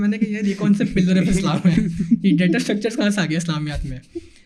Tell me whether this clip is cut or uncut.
uncut